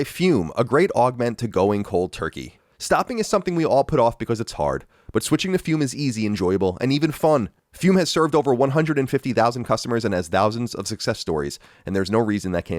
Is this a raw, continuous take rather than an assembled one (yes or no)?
no